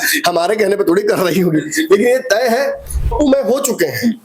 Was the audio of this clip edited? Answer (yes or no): yes